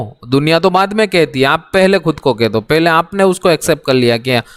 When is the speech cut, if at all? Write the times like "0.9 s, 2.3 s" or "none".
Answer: none